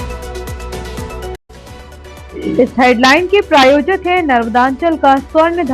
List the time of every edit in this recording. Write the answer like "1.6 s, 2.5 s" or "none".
1.4 s

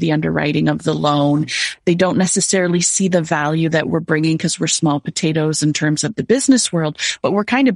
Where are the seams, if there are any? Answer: none

